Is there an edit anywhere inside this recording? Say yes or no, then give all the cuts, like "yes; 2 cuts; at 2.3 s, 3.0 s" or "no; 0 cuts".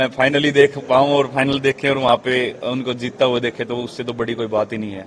no; 0 cuts